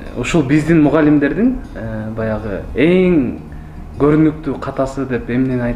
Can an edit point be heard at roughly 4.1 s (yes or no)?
no